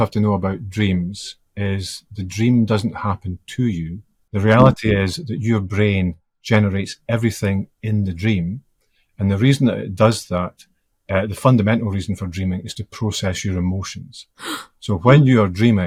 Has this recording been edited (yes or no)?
no